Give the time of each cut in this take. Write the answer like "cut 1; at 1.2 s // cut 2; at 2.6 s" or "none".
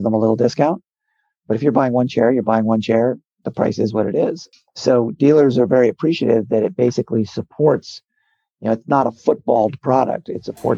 cut 1; at 4.5 s